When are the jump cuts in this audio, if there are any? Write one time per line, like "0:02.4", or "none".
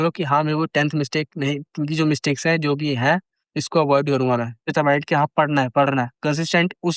0:04.7